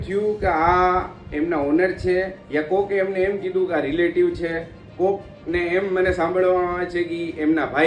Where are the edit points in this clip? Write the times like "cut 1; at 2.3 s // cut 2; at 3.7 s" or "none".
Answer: none